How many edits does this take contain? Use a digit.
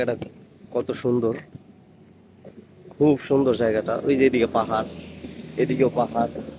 0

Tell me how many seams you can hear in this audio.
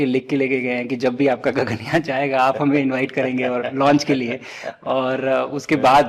0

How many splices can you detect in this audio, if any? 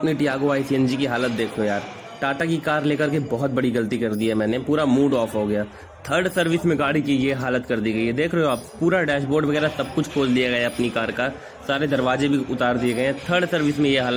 0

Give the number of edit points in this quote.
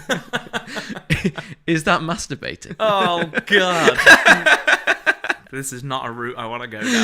2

